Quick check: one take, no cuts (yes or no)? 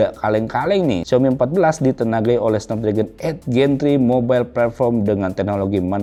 yes